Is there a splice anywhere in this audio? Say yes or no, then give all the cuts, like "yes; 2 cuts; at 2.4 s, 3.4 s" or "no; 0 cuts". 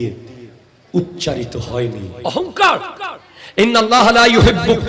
yes; 1 cut; at 2.1 s